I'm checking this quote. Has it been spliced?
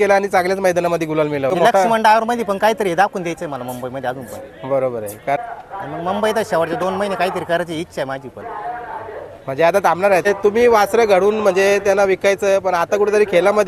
yes; 3 cuts; at 1.5 s, 5.4 s, 10.3 s

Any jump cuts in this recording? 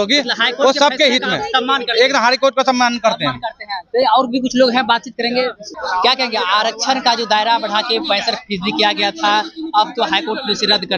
no; 0 cuts

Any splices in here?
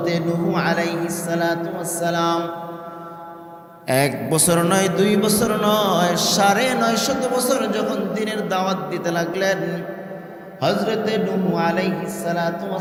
no; 0 cuts

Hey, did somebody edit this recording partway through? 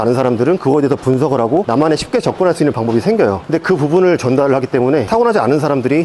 no; 0 cuts

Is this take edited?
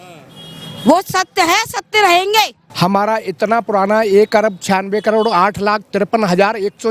yes; 1 cut; at 2.6 s

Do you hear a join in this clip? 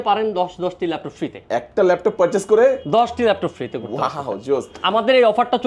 no; 0 cuts

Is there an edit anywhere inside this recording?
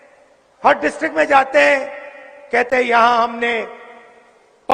no; 0 cuts

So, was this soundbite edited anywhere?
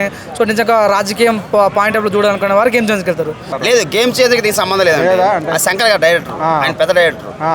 yes; 1 cut; at 3.5 s

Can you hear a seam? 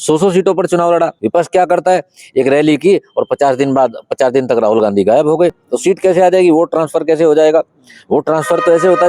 yes; 2 cuts; at 1.2 s, 5.6 s

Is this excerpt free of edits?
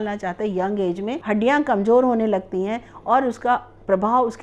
no; 1 cut; at 1.2 s

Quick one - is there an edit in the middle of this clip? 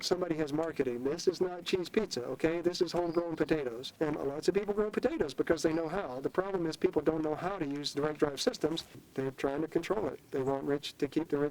yes; 3 cuts; at 3.8 s, 7.9 s, 9.0 s

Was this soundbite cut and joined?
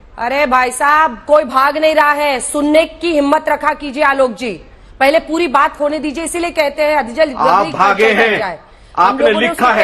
no; 0 cuts

